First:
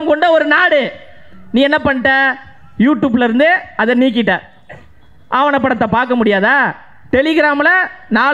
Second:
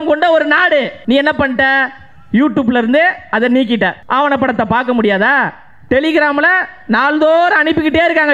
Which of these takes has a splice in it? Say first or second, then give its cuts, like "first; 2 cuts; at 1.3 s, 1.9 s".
second; 2 cuts; at 0.9 s, 4.0 s